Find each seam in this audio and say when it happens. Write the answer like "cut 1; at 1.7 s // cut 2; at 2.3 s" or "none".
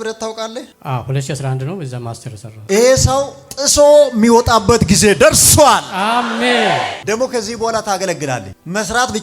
cut 1; at 7.0 s